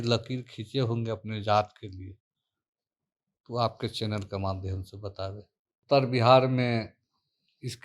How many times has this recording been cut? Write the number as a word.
one